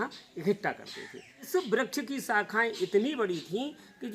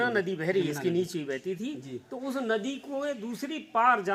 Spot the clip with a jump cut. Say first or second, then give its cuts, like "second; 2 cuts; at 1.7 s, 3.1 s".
first; 1 cut; at 1.4 s